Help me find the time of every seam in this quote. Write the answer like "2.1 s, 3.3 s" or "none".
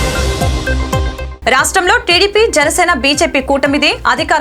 none